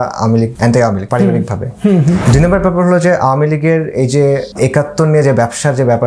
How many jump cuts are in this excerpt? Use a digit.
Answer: 3